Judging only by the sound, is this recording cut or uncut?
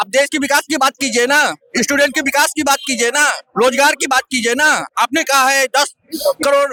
uncut